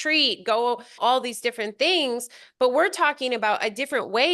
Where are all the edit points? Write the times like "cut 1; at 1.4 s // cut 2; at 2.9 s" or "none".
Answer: cut 1; at 1.0 s